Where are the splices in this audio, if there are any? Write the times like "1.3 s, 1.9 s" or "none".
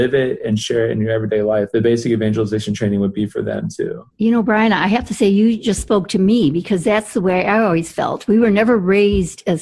1.7 s